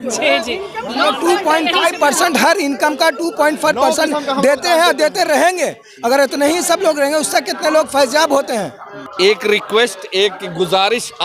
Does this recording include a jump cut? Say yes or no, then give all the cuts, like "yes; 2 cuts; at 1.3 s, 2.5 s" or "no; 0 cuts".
yes; 1 cut; at 9.0 s